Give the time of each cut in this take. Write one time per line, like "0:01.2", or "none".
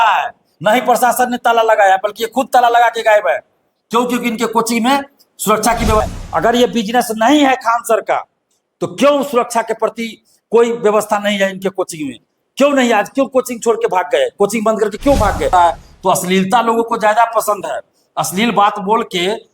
0:06.1
0:15.5

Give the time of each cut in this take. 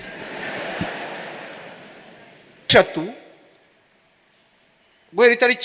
0:02.7

